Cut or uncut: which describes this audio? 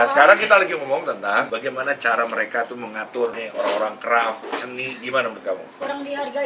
cut